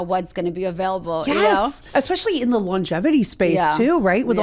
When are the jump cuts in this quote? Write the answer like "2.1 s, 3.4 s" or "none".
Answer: none